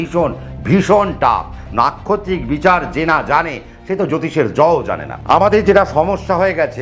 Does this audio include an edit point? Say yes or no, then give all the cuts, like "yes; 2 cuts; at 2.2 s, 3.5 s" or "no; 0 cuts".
yes; 1 cut; at 5.1 s